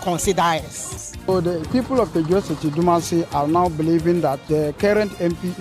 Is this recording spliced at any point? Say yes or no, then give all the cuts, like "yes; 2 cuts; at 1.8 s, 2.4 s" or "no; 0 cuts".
yes; 2 cuts; at 1.0 s, 4.4 s